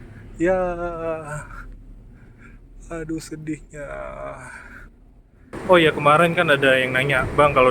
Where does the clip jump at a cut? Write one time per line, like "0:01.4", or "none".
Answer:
0:05.5